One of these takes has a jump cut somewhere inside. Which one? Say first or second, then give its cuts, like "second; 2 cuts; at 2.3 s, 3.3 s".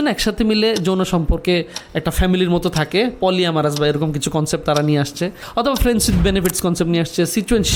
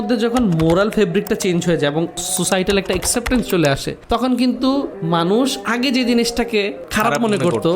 second; 4 cuts; at 2.3 s, 3.9 s, 5.0 s, 6.8 s